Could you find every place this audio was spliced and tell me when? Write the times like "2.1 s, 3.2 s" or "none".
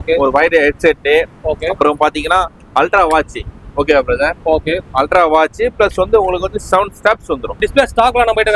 7.6 s